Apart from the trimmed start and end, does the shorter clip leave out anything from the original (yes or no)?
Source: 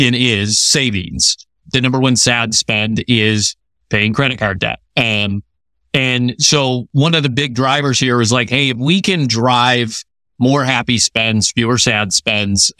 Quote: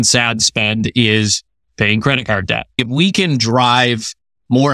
yes